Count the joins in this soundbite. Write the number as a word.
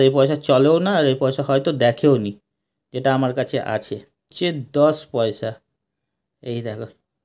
one